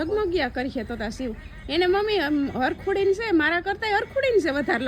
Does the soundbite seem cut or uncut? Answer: uncut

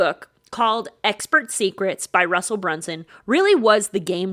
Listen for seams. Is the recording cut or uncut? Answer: uncut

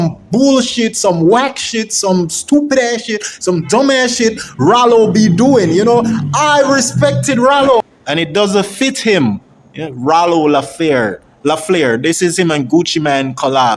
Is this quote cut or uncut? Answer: cut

